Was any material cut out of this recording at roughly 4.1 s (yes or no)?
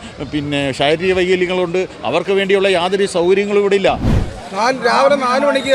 yes